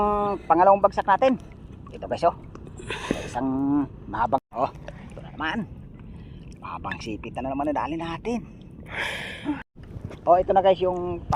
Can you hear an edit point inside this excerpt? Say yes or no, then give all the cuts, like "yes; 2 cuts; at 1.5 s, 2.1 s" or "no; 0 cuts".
yes; 2 cuts; at 4.4 s, 9.7 s